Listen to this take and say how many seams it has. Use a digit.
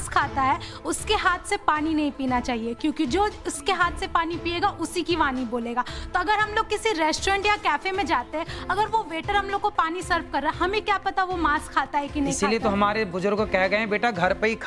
0